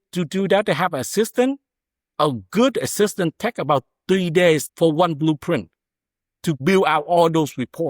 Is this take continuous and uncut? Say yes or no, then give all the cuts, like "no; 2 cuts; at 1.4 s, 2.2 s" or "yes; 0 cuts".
no; 2 cuts; at 4.7 s, 6.6 s